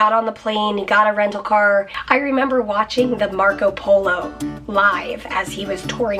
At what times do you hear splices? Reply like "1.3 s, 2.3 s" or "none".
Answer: 2.0 s

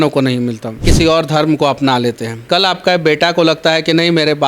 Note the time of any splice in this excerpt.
0.9 s, 2.3 s

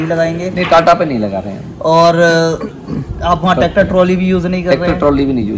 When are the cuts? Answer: none

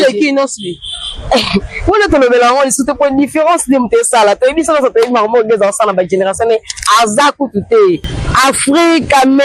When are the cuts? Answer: 8.1 s

